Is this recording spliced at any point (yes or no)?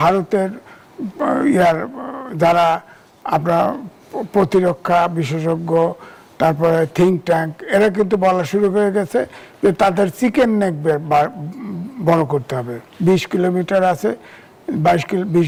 no